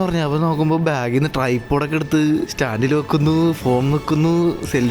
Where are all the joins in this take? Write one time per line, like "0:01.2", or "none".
0:02.5